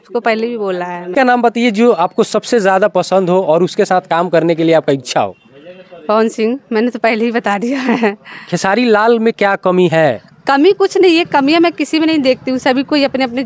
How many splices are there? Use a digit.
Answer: 1